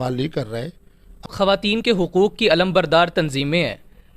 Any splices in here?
yes; 1 cut; at 1.3 s

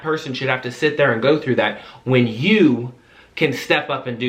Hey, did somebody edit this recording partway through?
no; 0 cuts

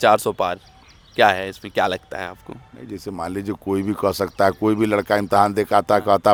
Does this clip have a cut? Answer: no; 0 cuts

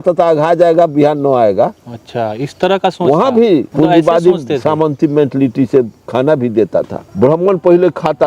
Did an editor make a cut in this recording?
yes; 2 cuts; at 3.7 s, 7.0 s

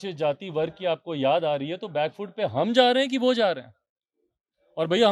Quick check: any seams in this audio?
no; 0 cuts

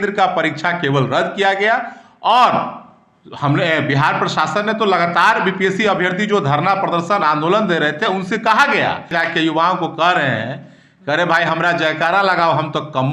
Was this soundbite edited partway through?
yes; 1 cut; at 9.1 s

